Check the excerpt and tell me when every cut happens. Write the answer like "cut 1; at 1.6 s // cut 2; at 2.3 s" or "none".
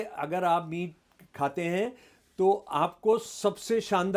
none